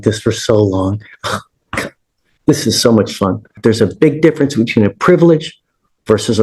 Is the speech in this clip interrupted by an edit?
yes; 1 cut; at 3.6 s

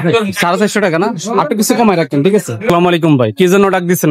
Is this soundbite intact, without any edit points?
no; 1 cut; at 2.6 s

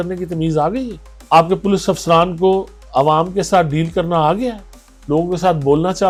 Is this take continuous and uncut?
yes; 0 cuts

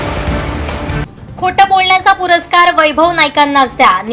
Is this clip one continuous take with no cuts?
no; 1 cut; at 1.1 s

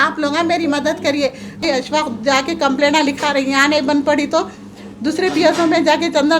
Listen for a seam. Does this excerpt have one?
yes; 1 cut; at 1.6 s

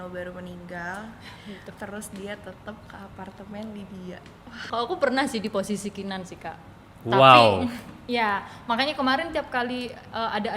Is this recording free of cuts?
no; 1 cut; at 4.6 s

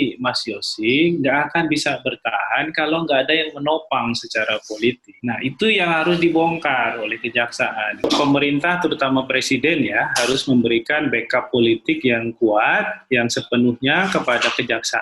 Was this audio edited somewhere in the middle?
yes; 2 cuts; at 5.1 s, 8.0 s

